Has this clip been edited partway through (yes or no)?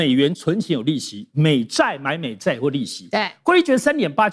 no